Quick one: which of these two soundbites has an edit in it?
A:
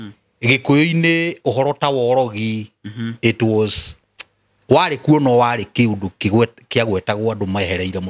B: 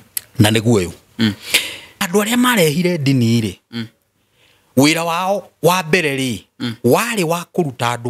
B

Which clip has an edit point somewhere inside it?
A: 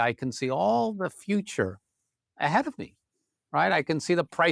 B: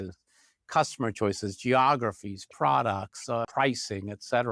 B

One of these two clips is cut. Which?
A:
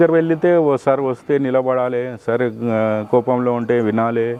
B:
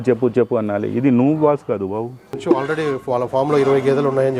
B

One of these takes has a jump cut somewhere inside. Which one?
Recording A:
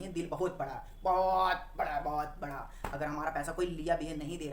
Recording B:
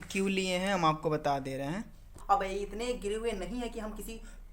B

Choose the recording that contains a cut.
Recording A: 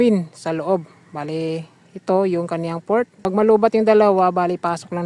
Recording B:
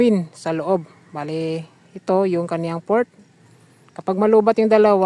A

